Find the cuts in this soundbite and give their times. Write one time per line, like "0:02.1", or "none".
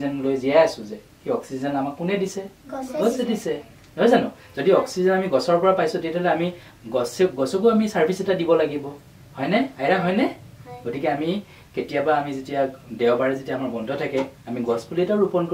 none

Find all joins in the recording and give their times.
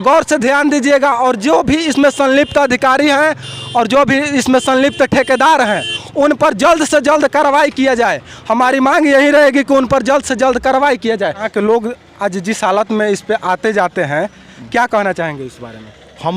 0:11.5

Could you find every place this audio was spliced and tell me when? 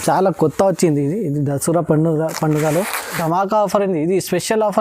0:03.2

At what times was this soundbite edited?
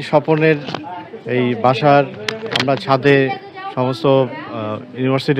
none

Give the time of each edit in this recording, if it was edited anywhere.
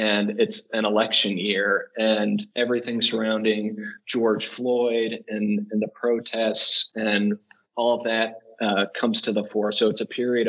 none

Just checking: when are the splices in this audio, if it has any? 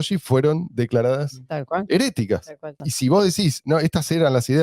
0:02.8

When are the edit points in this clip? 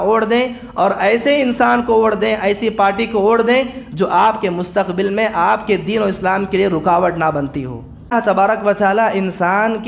0:08.1

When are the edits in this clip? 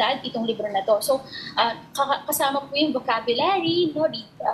none

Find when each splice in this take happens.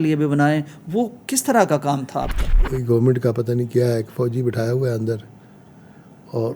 0:02.5

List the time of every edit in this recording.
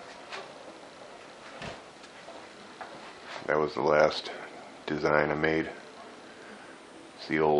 0:01.9

